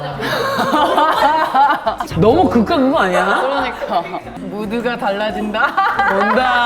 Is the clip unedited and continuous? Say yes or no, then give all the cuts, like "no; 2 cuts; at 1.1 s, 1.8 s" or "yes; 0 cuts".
no; 1 cut; at 4.4 s